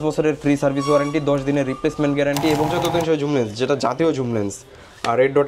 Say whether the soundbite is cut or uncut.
cut